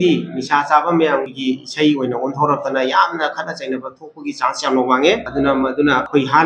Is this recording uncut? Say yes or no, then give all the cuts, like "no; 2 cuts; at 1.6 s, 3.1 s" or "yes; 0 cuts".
yes; 0 cuts